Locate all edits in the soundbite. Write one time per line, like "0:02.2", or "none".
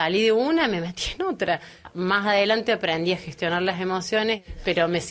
0:01.8
0:04.4